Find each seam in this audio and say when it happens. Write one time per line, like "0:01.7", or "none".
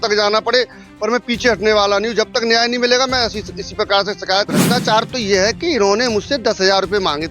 0:04.6